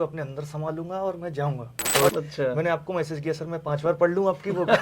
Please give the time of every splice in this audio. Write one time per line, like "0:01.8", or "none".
0:02.1